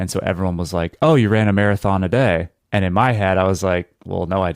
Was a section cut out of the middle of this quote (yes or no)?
yes